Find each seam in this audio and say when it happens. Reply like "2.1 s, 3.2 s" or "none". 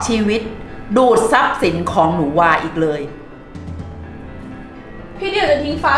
3.7 s, 5.1 s